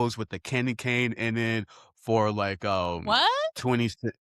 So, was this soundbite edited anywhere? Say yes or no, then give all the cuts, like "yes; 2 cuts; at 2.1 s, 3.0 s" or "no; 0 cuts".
no; 0 cuts